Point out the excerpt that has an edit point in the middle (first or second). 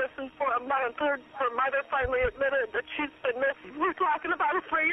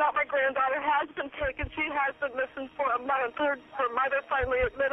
first